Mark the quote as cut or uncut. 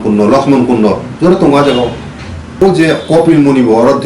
cut